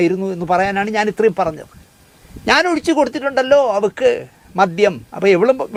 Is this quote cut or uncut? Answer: uncut